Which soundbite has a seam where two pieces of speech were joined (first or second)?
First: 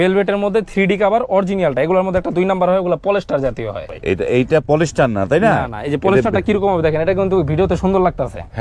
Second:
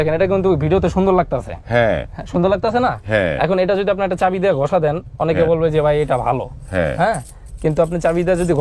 first